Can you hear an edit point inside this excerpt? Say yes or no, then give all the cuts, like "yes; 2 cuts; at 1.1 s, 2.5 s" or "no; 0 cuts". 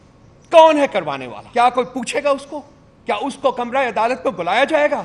yes; 1 cut; at 1.3 s